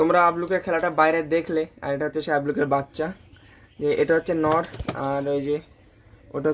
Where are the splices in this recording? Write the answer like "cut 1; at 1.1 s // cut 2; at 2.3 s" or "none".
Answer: none